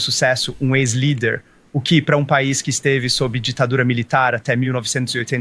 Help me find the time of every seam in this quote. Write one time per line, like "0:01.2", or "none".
none